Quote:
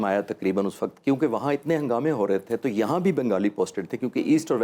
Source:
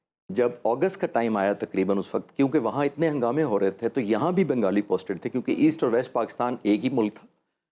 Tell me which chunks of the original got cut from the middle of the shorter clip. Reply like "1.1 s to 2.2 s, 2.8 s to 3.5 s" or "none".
none